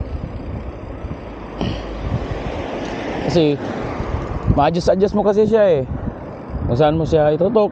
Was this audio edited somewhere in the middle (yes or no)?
no